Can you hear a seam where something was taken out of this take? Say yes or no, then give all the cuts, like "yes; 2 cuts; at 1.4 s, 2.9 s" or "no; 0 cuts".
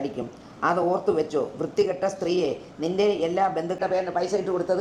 yes; 1 cut; at 3.8 s